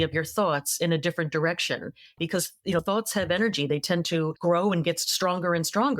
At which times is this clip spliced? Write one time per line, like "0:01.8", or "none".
0:02.2
0:04.3